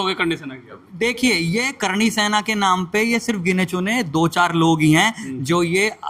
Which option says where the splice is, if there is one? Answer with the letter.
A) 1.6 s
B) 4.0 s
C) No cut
C